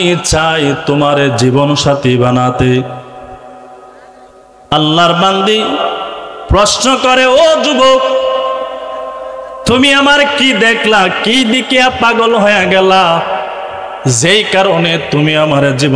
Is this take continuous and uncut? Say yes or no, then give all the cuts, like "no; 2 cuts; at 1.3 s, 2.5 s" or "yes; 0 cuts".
yes; 0 cuts